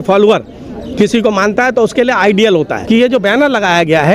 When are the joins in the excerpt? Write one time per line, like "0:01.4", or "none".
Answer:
0:02.8